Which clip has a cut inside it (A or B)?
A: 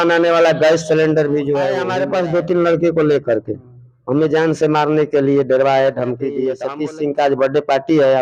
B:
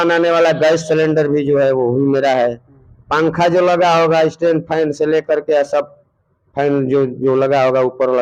A